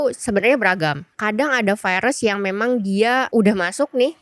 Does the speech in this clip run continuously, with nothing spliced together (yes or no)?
no